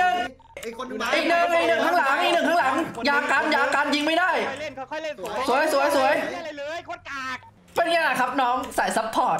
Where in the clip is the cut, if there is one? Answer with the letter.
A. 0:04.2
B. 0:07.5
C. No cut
B